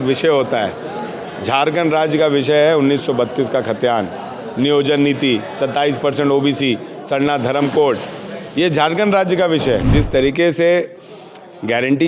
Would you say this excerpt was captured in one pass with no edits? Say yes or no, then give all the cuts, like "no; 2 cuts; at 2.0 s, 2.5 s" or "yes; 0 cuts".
no; 1 cut; at 9.9 s